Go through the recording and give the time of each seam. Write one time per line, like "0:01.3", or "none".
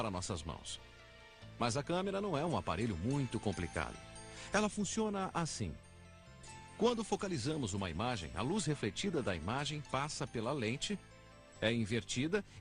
none